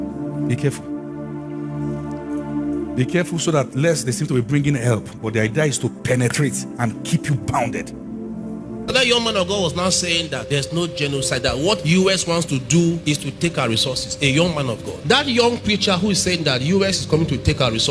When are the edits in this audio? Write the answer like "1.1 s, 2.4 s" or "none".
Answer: 8.9 s